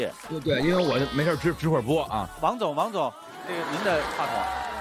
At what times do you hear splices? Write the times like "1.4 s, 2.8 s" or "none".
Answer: 2.3 s